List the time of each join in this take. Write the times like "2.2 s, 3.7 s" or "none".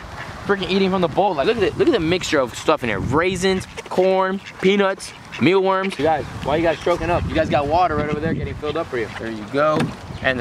1.4 s, 5.9 s, 9.2 s